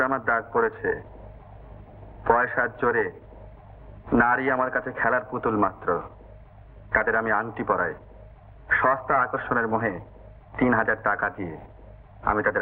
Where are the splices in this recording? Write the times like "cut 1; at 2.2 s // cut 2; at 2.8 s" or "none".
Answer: none